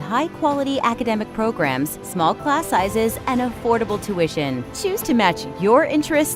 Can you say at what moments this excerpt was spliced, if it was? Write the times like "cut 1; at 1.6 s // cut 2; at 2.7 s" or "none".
none